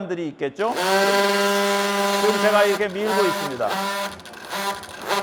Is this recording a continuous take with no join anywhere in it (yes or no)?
yes